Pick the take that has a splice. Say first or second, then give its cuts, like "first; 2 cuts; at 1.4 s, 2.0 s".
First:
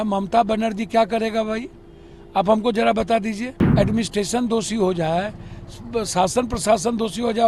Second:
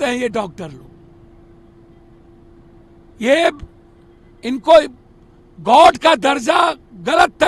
first; 1 cut; at 3.5 s